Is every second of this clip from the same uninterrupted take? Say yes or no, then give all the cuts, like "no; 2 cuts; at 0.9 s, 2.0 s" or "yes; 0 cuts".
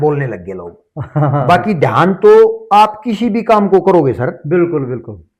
yes; 0 cuts